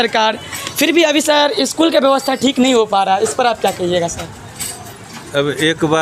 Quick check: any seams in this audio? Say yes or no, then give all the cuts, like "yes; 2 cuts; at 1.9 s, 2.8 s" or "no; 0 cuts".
no; 0 cuts